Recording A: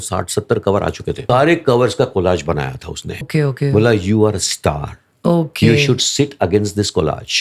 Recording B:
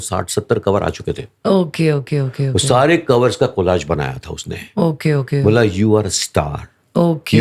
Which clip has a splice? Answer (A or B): A